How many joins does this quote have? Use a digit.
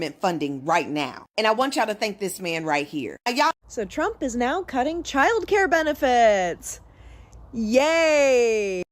1